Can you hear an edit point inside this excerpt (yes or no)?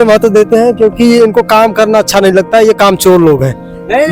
no